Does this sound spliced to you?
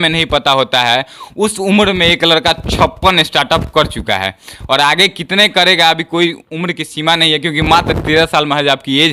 no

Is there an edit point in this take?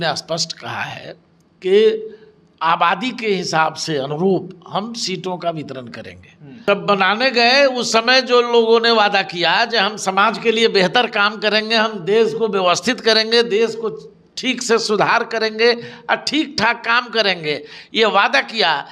yes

